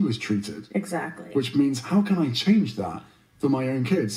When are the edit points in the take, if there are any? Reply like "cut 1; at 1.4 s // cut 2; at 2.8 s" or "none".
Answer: none